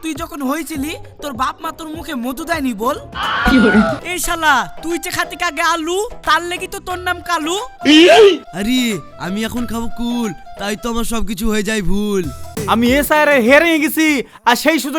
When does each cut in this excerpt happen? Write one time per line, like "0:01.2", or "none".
0:04.0
0:12.5